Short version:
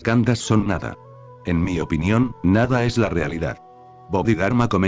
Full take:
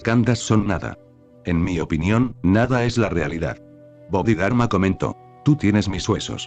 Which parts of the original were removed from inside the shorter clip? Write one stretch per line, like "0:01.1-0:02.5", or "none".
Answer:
none